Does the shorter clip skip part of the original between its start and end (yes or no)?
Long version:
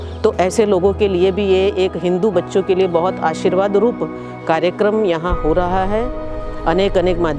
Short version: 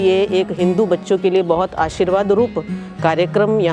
no